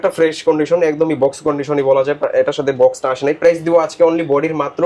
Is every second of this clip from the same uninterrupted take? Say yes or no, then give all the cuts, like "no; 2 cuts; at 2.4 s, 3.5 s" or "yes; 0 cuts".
yes; 0 cuts